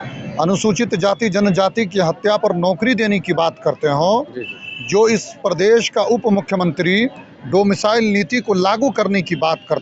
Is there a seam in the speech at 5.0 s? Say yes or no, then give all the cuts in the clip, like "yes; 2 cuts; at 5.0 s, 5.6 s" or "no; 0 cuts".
no; 0 cuts